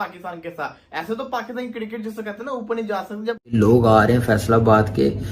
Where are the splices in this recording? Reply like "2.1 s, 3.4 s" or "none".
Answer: 3.5 s